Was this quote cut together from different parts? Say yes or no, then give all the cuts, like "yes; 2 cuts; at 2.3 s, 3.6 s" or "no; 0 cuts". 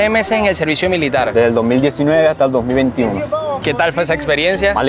no; 0 cuts